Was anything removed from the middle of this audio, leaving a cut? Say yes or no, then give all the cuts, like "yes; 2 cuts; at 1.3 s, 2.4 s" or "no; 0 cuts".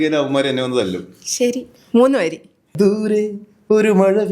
no; 0 cuts